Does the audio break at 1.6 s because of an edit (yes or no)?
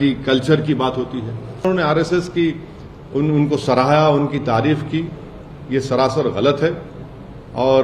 yes